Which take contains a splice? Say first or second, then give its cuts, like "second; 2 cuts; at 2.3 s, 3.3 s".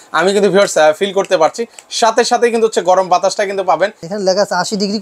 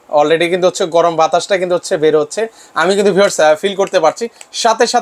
first; 1 cut; at 4.0 s